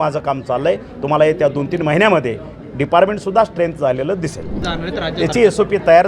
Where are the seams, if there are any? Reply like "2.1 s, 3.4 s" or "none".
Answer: 4.6 s